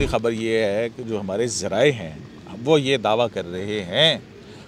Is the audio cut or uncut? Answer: uncut